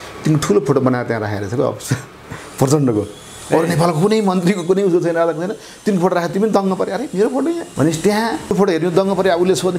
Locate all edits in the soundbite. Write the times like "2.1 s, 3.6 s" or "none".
7.7 s, 8.5 s